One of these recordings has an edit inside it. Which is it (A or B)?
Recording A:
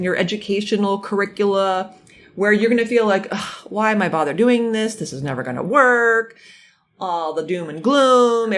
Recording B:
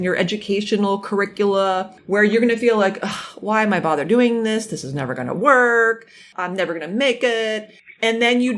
B